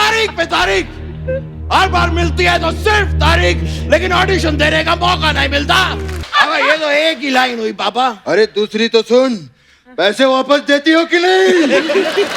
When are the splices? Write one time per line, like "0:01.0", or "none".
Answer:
0:06.2